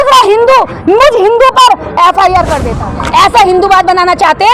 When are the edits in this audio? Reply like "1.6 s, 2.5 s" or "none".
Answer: 2.7 s